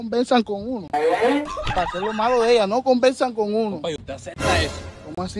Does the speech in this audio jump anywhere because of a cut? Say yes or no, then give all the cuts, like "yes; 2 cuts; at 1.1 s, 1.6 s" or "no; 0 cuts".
no; 0 cuts